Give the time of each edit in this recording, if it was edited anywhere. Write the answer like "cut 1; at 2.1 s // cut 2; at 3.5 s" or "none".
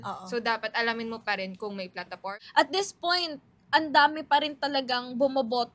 cut 1; at 2.3 s